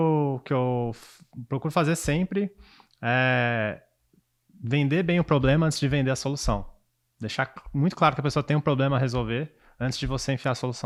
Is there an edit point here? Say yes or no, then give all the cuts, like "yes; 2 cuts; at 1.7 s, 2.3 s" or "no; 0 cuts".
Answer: no; 0 cuts